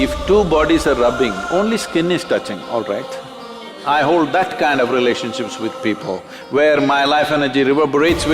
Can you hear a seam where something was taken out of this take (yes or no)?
yes